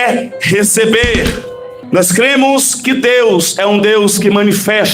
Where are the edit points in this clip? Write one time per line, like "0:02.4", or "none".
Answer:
0:01.8